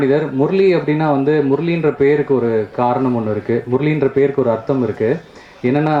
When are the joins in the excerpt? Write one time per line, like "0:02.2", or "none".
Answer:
none